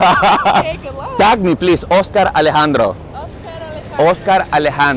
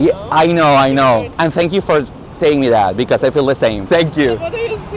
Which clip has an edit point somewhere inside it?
second; 2 cuts; at 1.3 s, 3.8 s

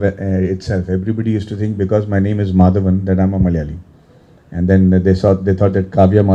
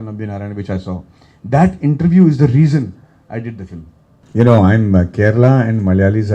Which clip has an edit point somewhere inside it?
second; 1 cut; at 4.2 s

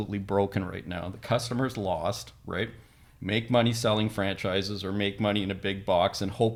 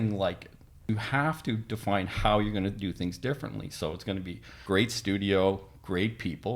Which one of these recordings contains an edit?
second; 2 cuts; at 0.8 s, 4.5 s

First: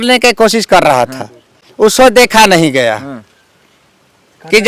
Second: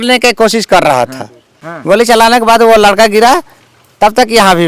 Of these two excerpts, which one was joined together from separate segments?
second; 1 cut; at 1.6 s

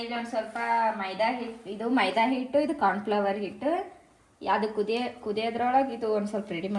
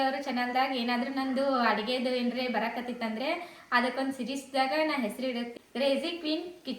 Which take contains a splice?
second; 1 cut; at 5.6 s

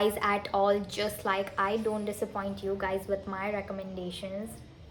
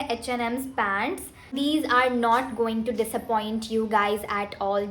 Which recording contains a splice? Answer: second; 1 cut; at 1.5 s

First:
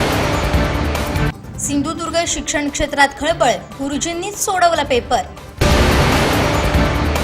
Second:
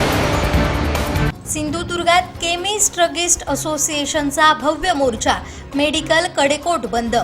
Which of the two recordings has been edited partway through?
second; 1 cut; at 1.3 s

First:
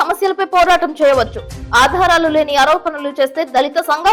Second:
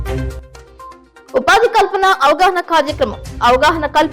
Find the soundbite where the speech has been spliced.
second; 1 cut; at 1.1 s

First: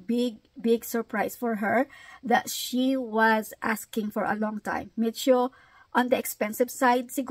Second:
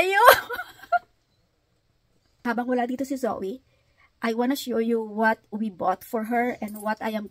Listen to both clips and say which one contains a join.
second; 1 cut; at 2.3 s

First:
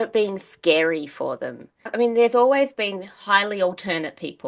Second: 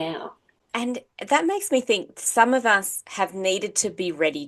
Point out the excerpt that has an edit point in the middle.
first; 1 cut; at 1.9 s

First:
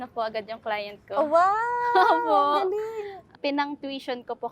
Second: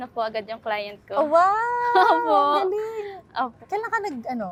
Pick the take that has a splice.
first; 1 cut; at 3.2 s

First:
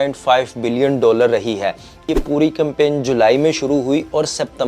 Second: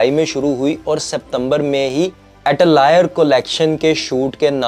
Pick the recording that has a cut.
first; 1 cut; at 2.0 s

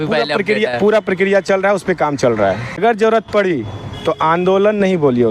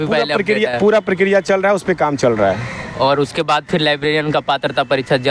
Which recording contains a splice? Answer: first; 1 cut; at 2.8 s

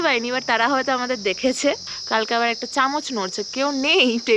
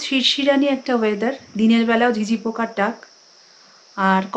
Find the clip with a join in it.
first; 1 cut; at 1.9 s

